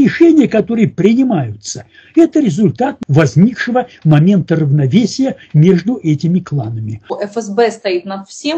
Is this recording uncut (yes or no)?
no